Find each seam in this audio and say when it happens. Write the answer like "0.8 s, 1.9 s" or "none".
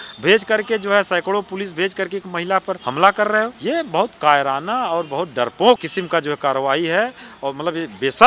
2.8 s, 3.6 s, 5.9 s